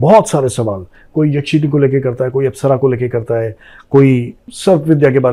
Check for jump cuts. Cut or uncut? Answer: uncut